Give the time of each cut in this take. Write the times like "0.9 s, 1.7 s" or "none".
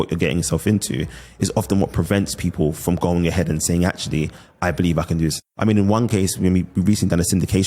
5.3 s